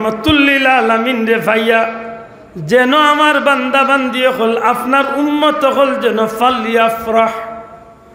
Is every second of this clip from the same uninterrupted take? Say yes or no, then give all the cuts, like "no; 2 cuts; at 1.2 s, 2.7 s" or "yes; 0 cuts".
yes; 0 cuts